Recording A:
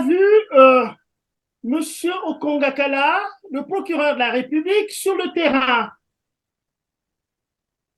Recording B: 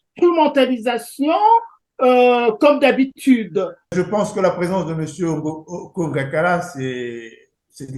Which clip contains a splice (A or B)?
B